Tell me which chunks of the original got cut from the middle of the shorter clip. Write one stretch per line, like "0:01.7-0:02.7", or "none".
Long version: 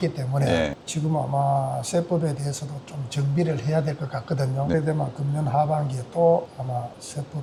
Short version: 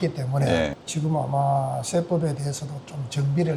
none